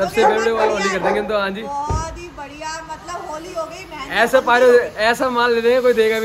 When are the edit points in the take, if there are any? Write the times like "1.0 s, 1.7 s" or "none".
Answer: none

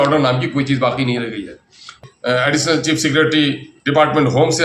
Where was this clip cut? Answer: 2.0 s

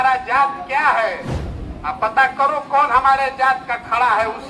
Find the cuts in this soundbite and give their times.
none

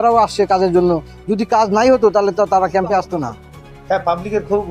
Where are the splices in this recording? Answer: 3.2 s

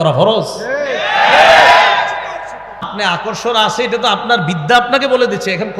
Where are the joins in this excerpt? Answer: 3.2 s

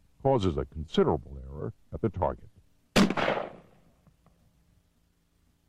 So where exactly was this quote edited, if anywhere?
none

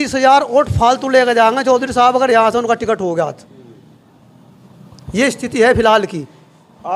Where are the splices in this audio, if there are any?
none

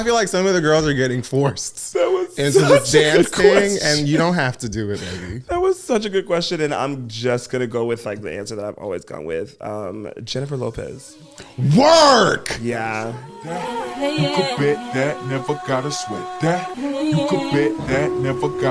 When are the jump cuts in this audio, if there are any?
13.5 s

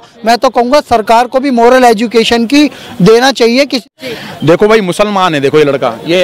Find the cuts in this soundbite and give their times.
3.8 s

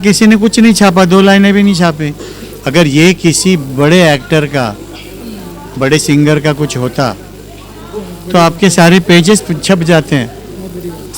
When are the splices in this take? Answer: none

